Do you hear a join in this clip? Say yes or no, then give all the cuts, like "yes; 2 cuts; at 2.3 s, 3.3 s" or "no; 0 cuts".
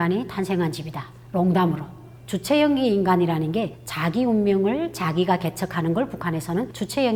no; 0 cuts